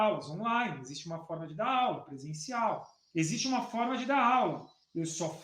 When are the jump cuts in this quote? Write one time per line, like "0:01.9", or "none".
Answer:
0:02.9